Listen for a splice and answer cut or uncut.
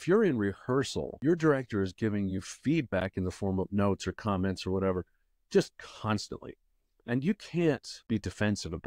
cut